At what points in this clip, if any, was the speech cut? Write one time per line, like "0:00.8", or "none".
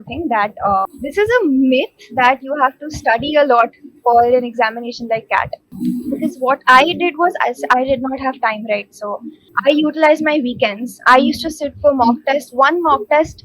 0:00.9
0:05.6
0:09.5